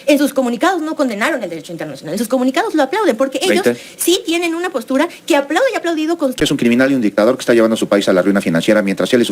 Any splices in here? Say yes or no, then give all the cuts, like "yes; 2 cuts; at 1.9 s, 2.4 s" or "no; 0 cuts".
yes; 1 cut; at 6.4 s